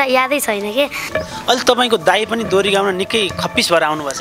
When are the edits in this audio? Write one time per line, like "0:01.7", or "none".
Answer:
0:01.0